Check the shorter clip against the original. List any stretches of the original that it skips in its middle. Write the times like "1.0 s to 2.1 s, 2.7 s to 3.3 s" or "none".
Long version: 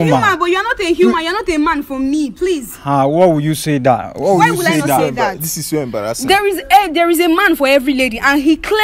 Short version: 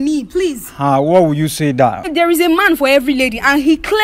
4.2 s to 6.9 s